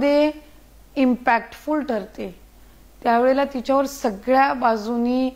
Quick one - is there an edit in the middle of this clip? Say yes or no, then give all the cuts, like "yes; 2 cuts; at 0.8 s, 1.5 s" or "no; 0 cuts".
no; 0 cuts